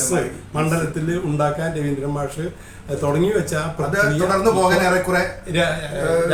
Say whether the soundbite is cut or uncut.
uncut